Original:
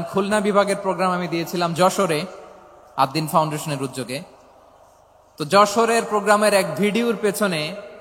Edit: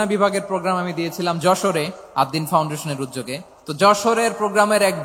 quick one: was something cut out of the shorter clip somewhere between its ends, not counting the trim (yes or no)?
yes